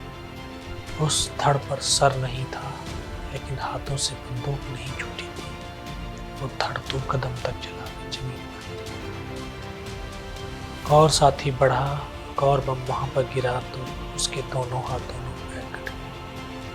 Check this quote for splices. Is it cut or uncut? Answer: uncut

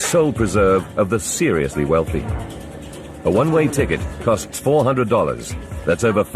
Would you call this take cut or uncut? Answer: uncut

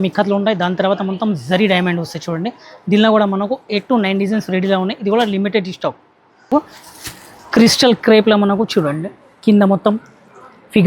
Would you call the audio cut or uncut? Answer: cut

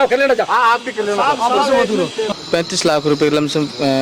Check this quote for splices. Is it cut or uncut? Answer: cut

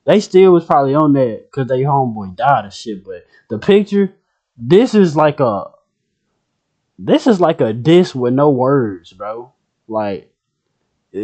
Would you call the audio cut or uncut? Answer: uncut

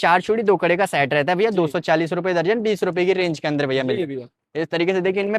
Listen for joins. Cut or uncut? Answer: uncut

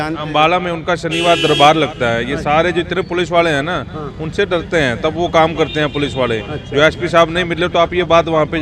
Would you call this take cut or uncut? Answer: uncut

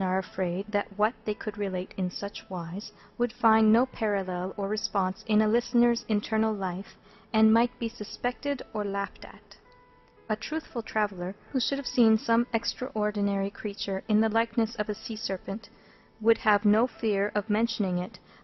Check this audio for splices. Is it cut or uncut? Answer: cut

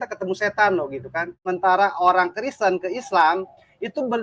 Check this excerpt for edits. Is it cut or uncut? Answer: cut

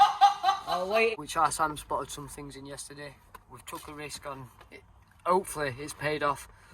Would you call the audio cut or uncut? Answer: cut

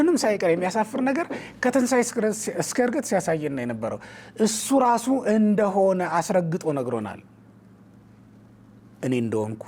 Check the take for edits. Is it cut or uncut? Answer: uncut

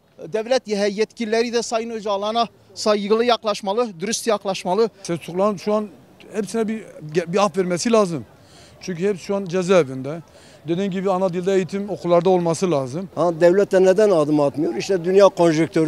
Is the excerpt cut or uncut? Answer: cut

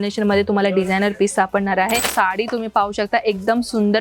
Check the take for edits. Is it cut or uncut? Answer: cut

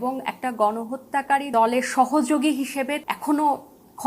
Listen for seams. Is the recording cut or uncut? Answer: cut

